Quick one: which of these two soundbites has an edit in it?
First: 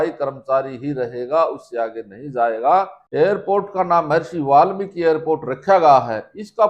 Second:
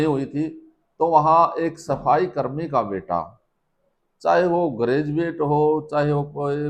first; 1 cut; at 3.0 s

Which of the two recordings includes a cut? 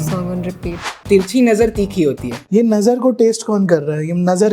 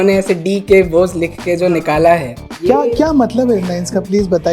first; 2 cuts; at 1.0 s, 2.3 s

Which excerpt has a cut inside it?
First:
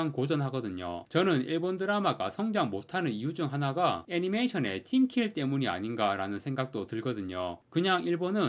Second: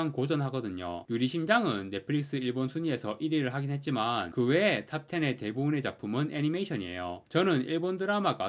first; 2 cuts; at 1.0 s, 7.6 s

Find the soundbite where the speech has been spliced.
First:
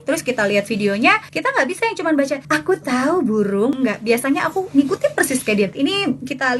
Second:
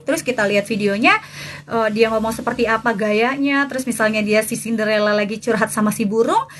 first; 4 cuts; at 1.3 s, 2.4 s, 3.7 s, 5.7 s

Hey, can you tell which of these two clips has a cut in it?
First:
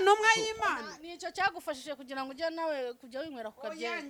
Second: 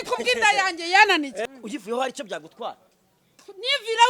second; 1 cut; at 1.4 s

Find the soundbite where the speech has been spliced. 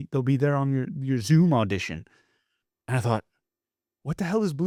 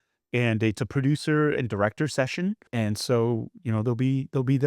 second; 1 cut; at 2.7 s

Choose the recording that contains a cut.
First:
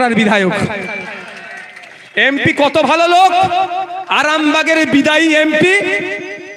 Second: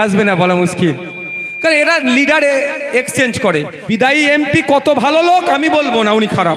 second; 1 cut; at 3.8 s

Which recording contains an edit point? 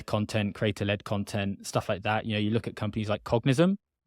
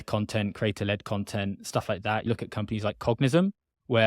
second; 1 cut; at 2.2 s

